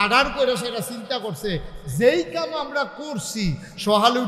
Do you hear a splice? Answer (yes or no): no